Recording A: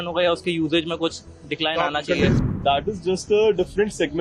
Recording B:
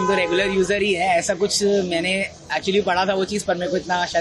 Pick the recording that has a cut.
A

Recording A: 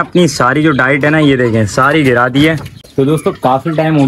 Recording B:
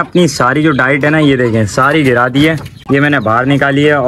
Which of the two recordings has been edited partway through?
A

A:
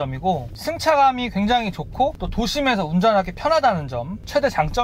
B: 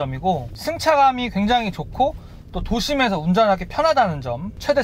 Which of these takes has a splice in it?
A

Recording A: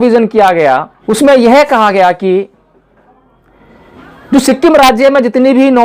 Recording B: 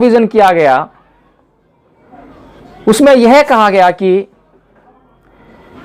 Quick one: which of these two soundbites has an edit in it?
A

